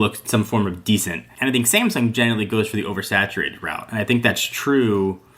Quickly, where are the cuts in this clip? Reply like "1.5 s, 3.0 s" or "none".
1.3 s